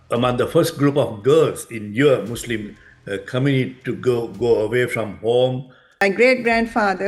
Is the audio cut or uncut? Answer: cut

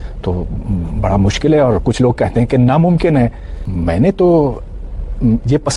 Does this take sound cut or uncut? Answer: cut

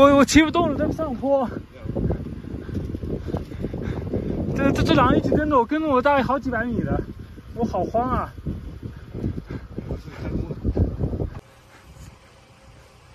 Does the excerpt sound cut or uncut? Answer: cut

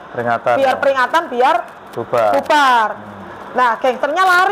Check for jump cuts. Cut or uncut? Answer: uncut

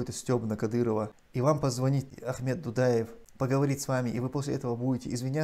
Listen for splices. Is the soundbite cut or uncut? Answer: cut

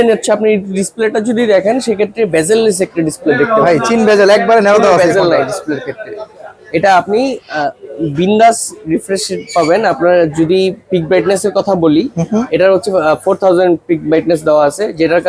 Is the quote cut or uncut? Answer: uncut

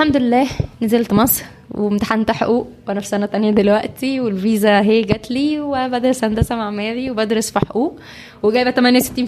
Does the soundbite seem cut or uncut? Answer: uncut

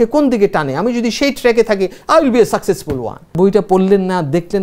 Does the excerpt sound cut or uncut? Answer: cut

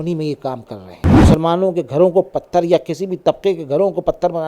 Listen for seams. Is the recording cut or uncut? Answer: cut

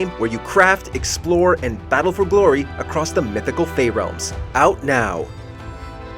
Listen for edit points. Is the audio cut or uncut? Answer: cut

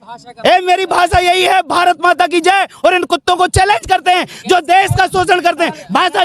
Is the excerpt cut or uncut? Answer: uncut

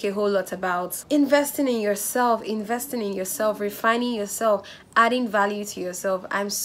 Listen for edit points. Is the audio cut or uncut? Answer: cut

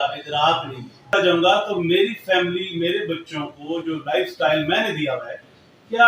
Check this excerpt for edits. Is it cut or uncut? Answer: cut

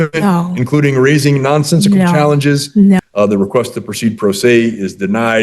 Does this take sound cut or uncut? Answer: cut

